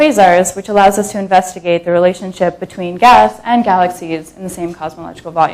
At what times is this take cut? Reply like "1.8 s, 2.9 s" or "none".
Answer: 3.4 s